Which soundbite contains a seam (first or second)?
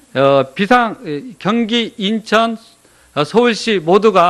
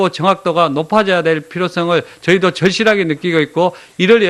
first